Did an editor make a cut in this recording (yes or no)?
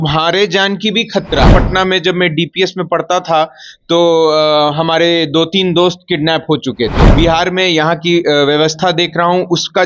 yes